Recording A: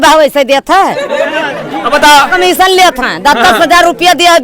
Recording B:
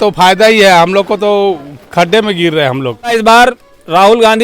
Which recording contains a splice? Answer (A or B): B